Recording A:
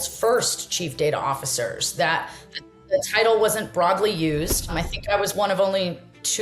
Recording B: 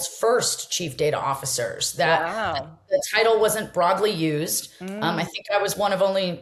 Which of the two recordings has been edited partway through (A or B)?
A